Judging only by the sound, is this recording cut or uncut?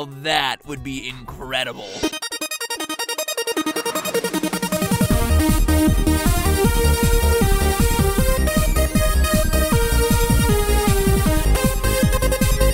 cut